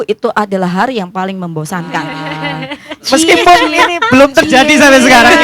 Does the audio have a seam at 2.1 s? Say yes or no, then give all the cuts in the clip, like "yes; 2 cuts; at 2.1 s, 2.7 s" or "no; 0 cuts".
yes; 1 cut; at 2.1 s